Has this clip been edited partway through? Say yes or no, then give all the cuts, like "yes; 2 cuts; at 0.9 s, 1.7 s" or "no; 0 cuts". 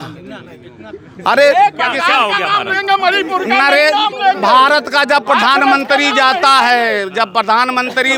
no; 0 cuts